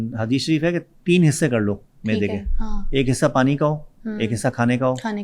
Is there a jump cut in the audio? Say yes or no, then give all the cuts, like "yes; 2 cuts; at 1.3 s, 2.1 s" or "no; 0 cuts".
no; 0 cuts